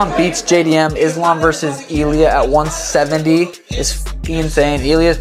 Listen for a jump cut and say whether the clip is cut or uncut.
uncut